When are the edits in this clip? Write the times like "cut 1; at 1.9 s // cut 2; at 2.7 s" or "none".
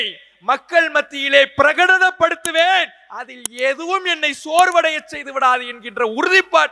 none